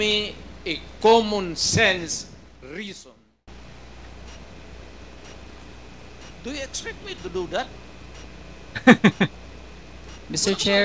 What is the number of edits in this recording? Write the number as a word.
one